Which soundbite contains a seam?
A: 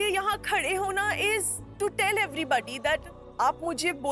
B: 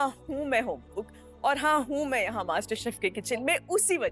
A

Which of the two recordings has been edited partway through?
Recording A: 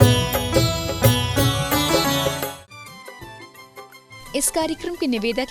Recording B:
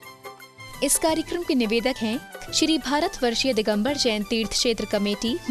A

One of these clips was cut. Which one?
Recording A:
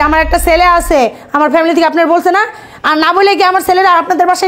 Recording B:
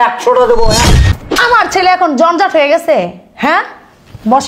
B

